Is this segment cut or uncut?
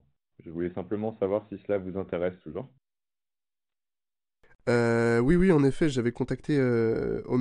uncut